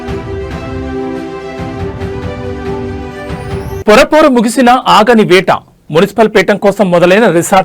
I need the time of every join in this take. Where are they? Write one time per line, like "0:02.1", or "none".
none